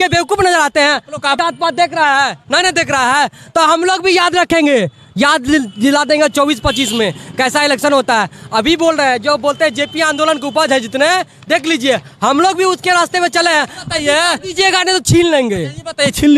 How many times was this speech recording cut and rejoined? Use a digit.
1